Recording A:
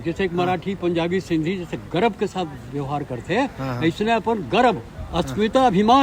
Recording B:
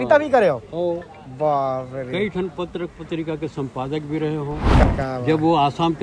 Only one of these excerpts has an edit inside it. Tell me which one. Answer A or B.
B